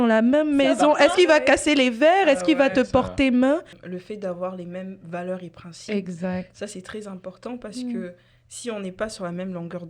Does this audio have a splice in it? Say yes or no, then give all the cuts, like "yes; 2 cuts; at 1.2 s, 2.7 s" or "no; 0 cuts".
yes; 1 cut; at 3.8 s